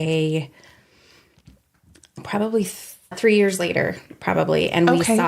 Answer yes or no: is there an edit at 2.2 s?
yes